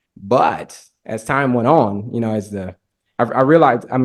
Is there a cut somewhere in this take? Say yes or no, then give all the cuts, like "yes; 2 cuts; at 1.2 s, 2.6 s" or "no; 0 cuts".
no; 0 cuts